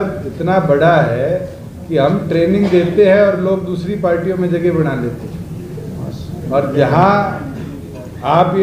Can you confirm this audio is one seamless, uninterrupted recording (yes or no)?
yes